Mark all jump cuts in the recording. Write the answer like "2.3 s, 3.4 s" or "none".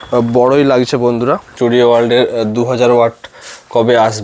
1.5 s